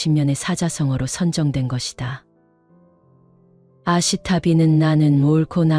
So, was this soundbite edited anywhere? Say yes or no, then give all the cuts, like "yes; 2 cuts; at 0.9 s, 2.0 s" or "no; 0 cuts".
yes; 2 cuts; at 2.3 s, 3.7 s